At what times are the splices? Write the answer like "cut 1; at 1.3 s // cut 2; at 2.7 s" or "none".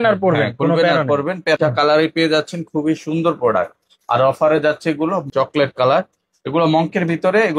cut 1; at 1.6 s // cut 2; at 5.2 s